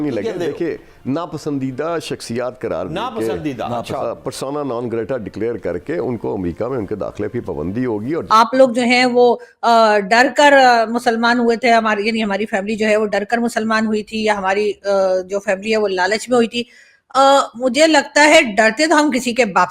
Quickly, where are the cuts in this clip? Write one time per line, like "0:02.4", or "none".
0:08.2